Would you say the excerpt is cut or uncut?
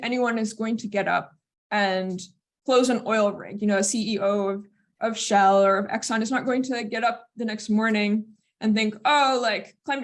uncut